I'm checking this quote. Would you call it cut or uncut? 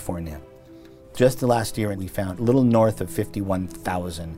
cut